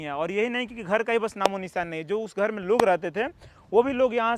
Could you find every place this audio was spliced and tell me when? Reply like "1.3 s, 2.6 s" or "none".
none